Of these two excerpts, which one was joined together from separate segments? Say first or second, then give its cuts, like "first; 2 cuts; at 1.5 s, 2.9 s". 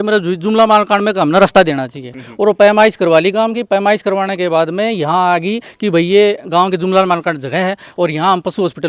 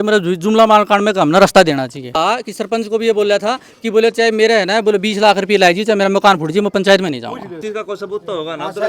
second; 2 cuts; at 2.1 s, 7.6 s